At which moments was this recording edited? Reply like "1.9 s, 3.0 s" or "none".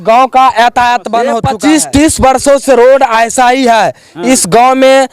1.5 s